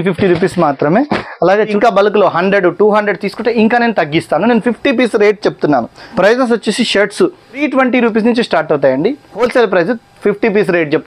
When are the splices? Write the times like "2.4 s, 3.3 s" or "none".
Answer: 1.7 s, 6.0 s, 7.6 s, 9.5 s